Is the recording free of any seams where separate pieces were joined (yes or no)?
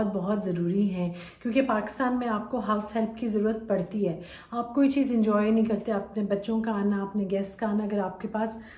yes